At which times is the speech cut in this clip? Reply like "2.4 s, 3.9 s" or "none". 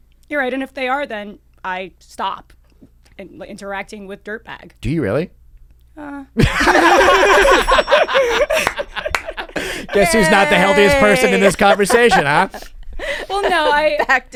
none